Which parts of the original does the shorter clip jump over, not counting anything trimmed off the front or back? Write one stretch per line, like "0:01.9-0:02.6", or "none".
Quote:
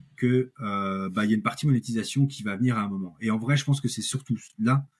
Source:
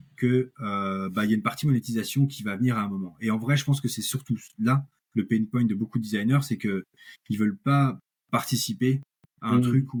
none